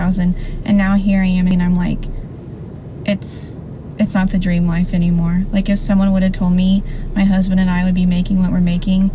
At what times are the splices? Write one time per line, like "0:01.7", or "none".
0:01.5